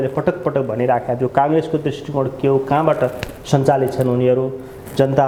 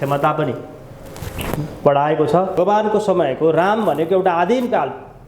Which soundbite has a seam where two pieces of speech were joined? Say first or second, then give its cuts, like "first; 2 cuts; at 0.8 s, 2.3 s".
second; 1 cut; at 2.6 s